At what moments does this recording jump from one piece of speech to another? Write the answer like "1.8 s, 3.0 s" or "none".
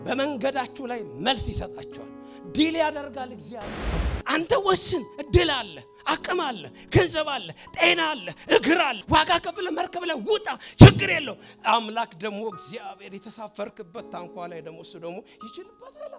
4.1 s, 9.0 s